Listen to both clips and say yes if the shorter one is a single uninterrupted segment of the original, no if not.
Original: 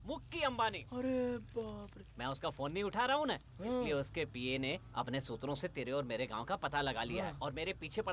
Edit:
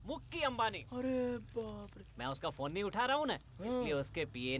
yes